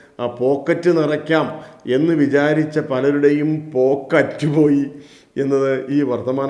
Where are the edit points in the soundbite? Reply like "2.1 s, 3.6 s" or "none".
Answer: none

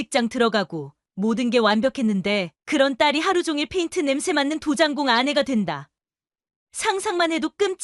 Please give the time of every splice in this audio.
none

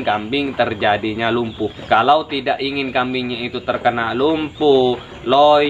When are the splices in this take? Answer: 1.8 s

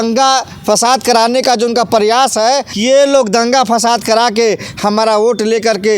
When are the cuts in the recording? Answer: 2.7 s

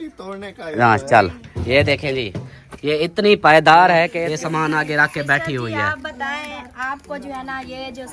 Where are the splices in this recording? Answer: 4.2 s

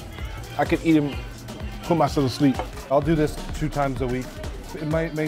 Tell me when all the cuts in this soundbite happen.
2.7 s

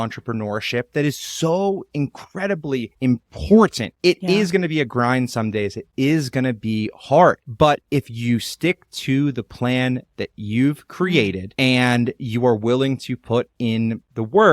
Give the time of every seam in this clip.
2.9 s

